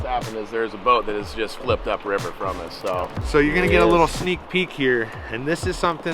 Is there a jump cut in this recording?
yes; 1 cut; at 3.1 s

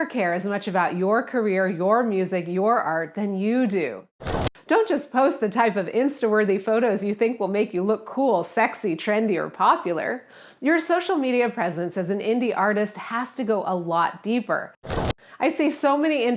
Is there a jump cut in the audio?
yes; 2 cuts; at 4.2 s, 15.0 s

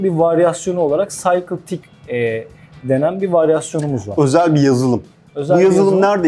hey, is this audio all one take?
no; 1 cut; at 5.1 s

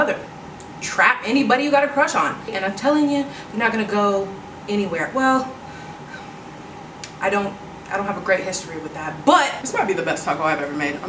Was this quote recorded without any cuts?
no; 1 cut; at 9.5 s

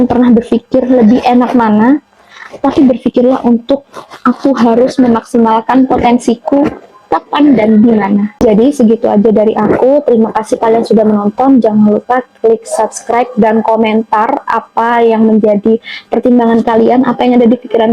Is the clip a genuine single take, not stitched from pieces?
yes; 0 cuts

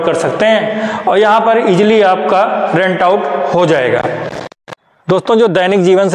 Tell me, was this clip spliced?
yes; 1 cut; at 4.7 s

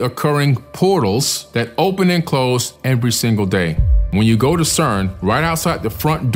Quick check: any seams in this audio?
yes; 2 cuts; at 1.4 s, 4.1 s

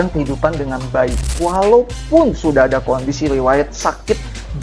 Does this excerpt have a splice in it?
yes; 1 cut; at 1.3 s

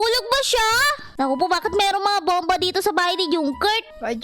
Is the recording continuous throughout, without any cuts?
no; 1 cut; at 1.0 s

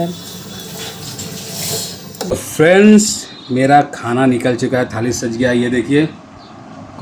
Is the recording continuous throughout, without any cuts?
no; 1 cut; at 2.3 s

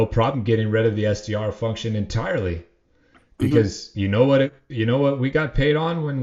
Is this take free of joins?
yes; 0 cuts

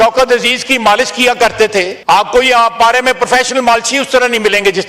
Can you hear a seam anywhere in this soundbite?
yes; 1 cut; at 2.0 s

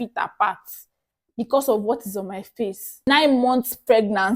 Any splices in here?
yes; 1 cut; at 3.1 s

